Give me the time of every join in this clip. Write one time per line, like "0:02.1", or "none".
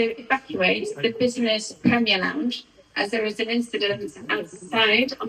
none